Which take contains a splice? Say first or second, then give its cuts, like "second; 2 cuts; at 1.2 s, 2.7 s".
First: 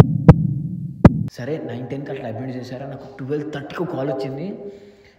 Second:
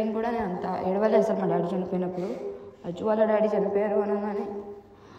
first; 1 cut; at 1.2 s